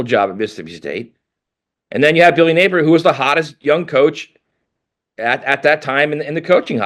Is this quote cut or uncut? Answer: uncut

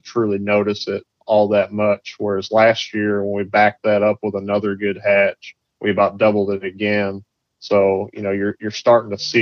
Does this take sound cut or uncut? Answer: uncut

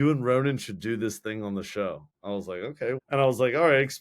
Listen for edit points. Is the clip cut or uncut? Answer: cut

